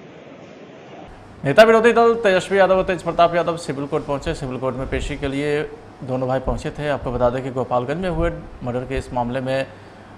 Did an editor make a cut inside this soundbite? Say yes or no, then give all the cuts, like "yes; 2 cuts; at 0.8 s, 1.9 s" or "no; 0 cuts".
yes; 1 cut; at 1.3 s